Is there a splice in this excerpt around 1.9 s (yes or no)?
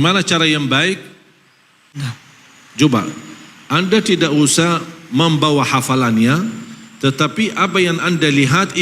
yes